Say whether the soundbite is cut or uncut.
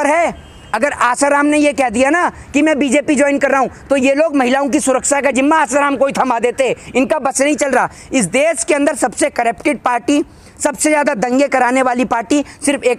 uncut